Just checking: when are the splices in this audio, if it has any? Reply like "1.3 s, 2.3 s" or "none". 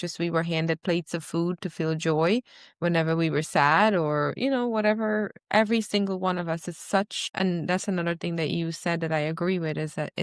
7.2 s